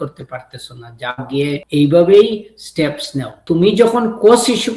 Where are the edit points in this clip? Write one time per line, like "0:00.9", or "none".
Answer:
0:01.6
0:03.4